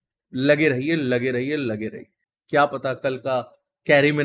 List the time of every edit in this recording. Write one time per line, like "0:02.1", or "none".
0:02.0